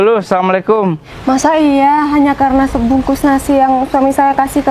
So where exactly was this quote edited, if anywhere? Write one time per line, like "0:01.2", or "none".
0:01.1